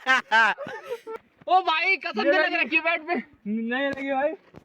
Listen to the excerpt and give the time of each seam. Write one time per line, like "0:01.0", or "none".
0:01.3